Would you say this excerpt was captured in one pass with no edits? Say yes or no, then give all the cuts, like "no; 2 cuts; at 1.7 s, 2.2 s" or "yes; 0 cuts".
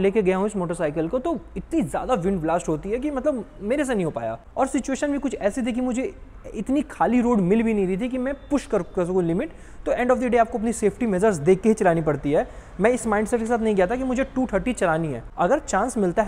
yes; 0 cuts